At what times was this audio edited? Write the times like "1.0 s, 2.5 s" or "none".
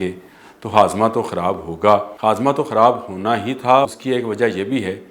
2.1 s, 3.9 s